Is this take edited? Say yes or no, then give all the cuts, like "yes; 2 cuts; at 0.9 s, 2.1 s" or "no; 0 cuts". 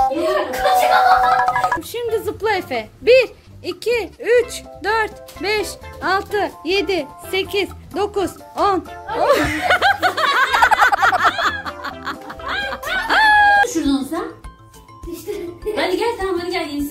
yes; 2 cuts; at 1.9 s, 13.6 s